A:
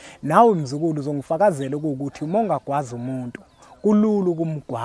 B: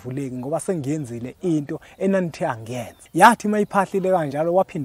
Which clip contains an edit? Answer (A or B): B